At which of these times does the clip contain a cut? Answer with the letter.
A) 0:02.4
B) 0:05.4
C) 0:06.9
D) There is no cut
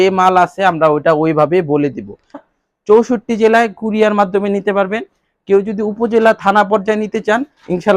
A